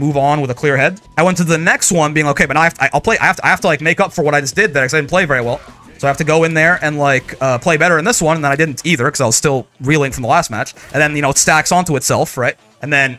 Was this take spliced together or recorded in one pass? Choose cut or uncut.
cut